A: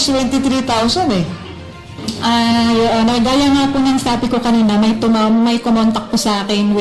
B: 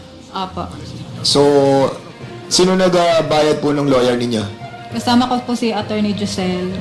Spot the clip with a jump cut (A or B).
B